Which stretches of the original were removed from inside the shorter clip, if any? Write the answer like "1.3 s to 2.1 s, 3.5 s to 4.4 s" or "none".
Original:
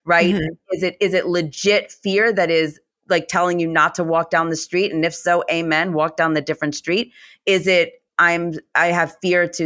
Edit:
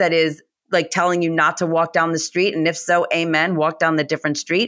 none

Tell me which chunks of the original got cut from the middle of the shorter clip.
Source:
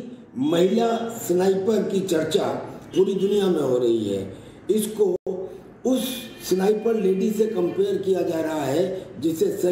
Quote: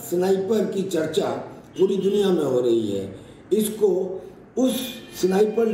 5.2 s to 5.3 s

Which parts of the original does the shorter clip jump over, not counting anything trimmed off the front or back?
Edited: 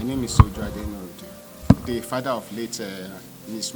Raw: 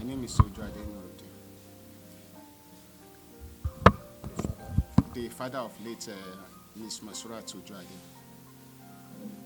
1.6 s to 4.9 s

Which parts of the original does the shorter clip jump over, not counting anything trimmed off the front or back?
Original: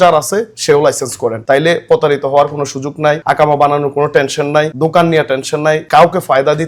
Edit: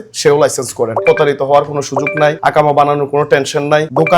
1.4 s to 1.8 s

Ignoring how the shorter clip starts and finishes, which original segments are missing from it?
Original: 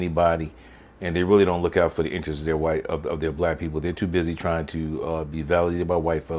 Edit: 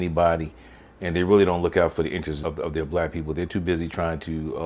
2.4 s to 2.9 s

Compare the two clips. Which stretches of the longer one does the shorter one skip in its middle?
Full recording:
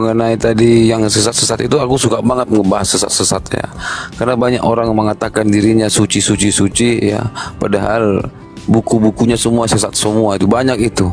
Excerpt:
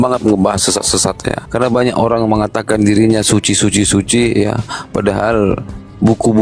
3.7 s to 4.1 s

